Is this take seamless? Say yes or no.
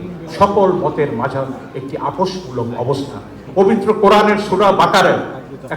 no